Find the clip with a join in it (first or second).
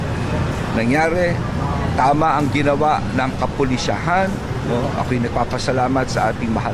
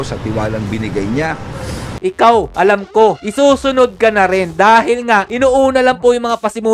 second